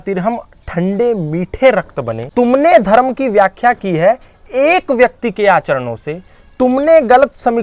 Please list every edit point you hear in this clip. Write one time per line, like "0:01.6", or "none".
0:02.2